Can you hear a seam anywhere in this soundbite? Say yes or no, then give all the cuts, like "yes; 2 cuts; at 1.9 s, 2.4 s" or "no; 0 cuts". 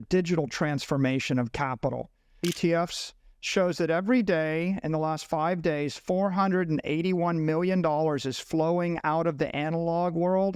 yes; 1 cut; at 2.5 s